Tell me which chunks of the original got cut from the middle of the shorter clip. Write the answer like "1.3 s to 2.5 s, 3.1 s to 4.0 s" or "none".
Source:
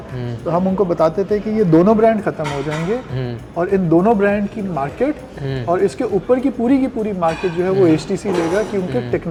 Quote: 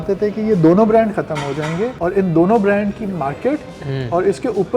3.0 s to 3.5 s